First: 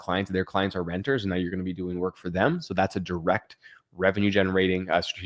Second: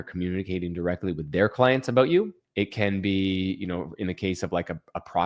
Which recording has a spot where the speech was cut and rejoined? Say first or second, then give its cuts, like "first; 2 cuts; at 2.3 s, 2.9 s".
second; 1 cut; at 2.4 s